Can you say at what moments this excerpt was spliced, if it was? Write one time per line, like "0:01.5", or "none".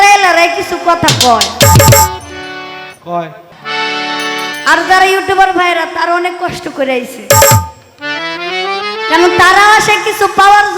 0:03.6